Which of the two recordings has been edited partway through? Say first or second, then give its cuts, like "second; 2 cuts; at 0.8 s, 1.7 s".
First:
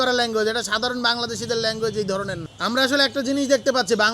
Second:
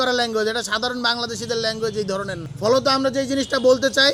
first; 1 cut; at 2.4 s